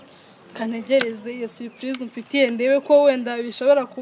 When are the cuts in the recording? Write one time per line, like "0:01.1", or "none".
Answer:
none